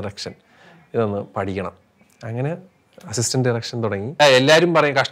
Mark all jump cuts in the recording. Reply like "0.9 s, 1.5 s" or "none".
4.2 s